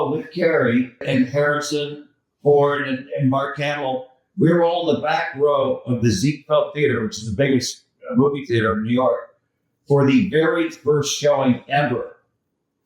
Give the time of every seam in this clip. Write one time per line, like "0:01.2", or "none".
0:01.0